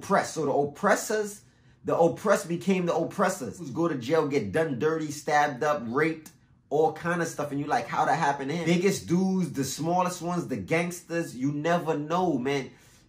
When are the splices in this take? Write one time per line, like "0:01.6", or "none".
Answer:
0:03.7
0:08.6